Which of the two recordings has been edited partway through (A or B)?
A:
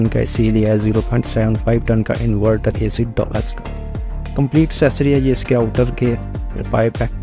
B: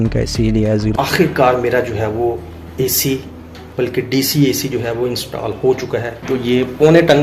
B